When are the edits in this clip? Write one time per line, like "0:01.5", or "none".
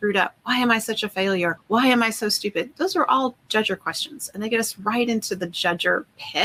none